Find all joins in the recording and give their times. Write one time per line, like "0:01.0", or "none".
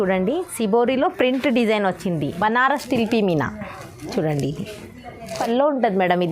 0:02.3
0:05.4